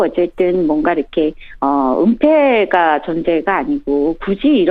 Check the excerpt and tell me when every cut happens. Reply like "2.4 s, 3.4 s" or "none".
1.3 s